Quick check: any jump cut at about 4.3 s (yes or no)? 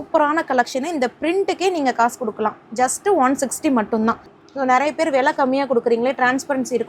yes